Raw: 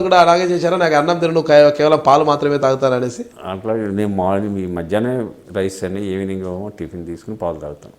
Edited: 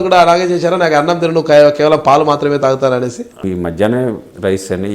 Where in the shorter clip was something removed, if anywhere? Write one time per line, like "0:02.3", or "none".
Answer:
0:03.4

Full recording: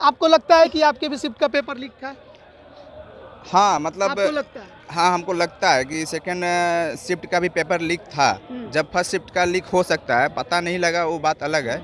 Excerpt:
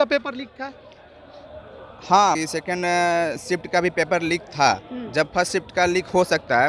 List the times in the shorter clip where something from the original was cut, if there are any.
0:02.4

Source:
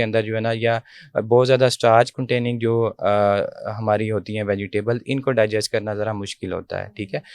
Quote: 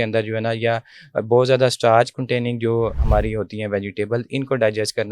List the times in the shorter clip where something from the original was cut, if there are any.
0:03.0

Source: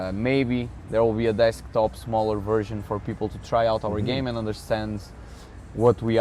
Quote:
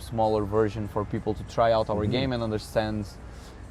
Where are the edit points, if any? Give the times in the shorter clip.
none

